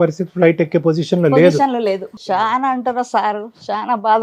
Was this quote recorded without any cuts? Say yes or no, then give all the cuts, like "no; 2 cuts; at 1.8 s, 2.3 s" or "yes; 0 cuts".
no; 1 cut; at 2.1 s